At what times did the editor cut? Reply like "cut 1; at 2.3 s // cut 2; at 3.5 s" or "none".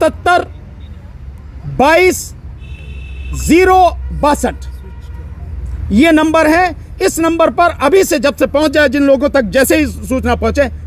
none